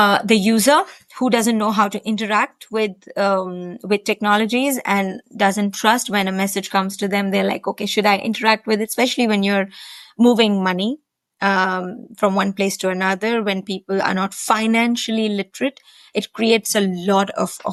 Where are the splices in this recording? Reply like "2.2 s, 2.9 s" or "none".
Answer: none